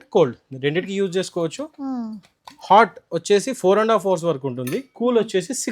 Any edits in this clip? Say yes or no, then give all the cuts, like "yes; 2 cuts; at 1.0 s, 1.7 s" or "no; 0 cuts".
no; 0 cuts